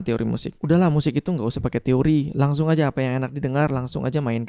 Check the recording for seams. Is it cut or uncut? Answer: uncut